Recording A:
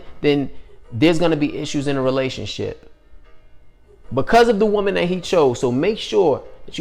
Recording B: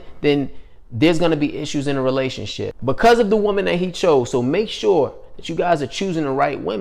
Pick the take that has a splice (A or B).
B